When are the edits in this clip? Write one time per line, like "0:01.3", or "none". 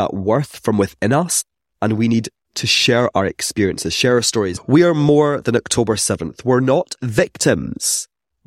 none